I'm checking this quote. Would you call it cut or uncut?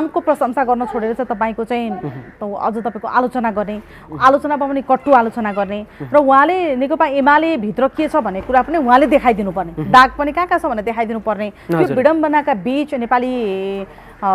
uncut